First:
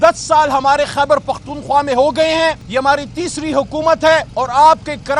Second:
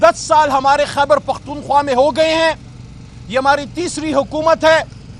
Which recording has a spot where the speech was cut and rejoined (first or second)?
first